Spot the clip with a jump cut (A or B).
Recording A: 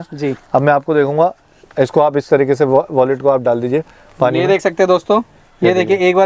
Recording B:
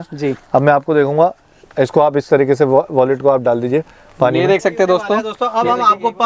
B